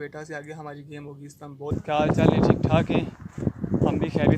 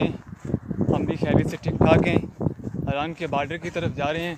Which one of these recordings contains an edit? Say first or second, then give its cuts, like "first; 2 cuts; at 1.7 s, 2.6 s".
first; 1 cut; at 1.7 s